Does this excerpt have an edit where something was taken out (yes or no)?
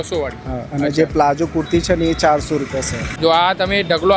yes